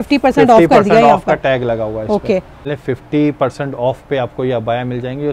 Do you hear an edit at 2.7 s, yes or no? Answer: yes